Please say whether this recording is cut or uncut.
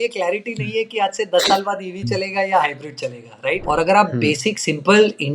cut